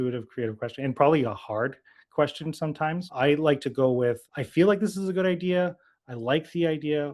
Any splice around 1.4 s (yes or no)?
no